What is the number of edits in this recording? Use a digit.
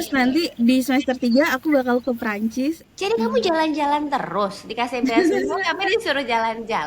1